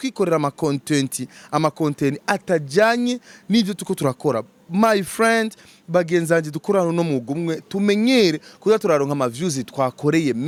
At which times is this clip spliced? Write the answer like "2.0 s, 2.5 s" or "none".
none

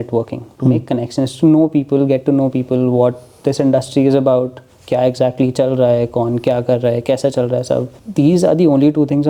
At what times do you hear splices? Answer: 8.0 s

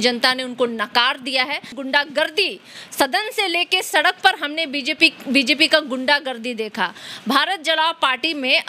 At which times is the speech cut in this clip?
1.7 s

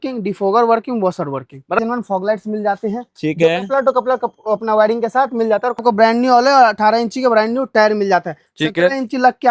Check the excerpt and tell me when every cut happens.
1.8 s, 5.8 s

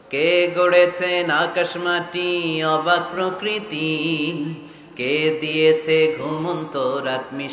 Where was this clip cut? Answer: none

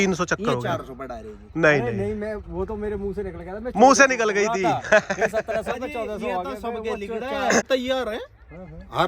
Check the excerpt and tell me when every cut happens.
7.7 s

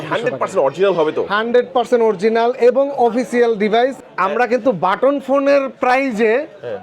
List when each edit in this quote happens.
4.0 s

